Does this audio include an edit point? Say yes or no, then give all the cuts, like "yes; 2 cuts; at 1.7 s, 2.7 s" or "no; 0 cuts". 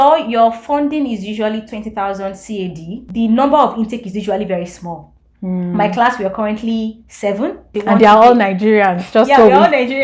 yes; 2 cuts; at 3.0 s, 7.7 s